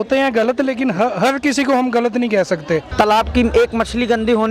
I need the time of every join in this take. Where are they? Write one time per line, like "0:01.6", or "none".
0:02.9